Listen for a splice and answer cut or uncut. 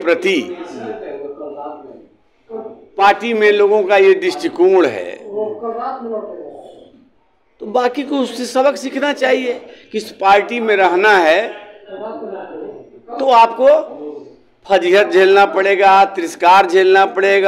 uncut